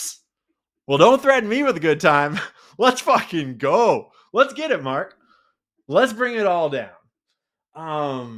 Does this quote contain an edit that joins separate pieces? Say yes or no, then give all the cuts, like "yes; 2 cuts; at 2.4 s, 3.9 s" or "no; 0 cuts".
no; 0 cuts